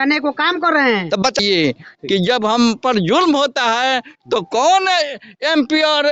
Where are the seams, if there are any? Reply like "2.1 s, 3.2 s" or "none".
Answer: 1.4 s